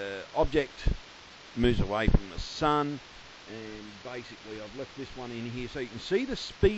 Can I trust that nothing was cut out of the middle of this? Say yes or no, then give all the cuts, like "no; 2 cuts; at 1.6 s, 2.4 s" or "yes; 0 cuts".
no; 1 cut; at 2.3 s